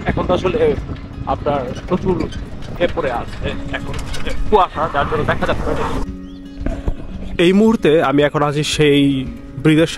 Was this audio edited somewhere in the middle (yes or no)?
yes